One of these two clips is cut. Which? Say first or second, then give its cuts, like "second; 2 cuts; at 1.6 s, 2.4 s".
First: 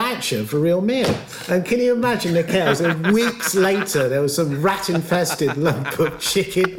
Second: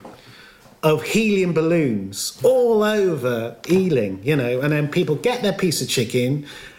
first; 1 cut; at 1.3 s